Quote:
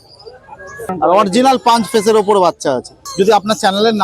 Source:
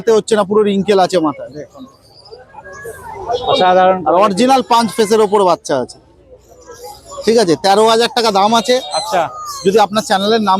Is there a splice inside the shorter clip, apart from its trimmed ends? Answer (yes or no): yes